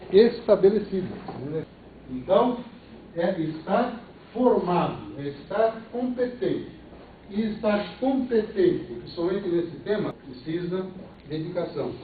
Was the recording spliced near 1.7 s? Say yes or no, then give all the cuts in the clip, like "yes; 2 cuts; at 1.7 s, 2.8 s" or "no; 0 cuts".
yes; 3 cuts; at 1.7 s, 10.2 s, 11.1 s